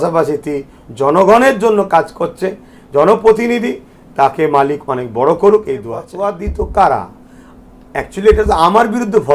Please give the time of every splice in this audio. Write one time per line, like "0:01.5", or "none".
0:06.1